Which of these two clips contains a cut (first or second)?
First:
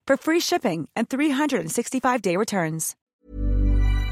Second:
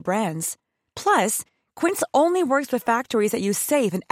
first